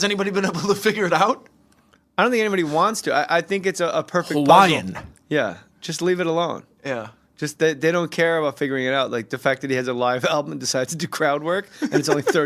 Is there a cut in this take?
no; 0 cuts

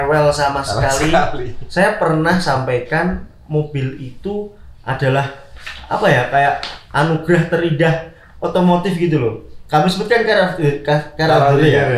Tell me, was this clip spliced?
no; 0 cuts

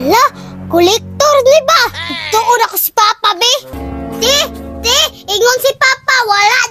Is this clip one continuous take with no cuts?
no; 1 cut; at 3.7 s

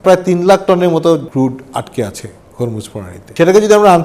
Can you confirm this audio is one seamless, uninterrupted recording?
no; 2 cuts; at 1.3 s, 3.2 s

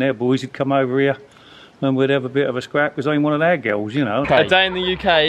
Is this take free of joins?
no; 1 cut; at 4.3 s

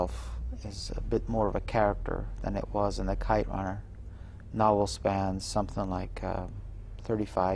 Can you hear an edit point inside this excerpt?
yes; 1 cut; at 2.0 s

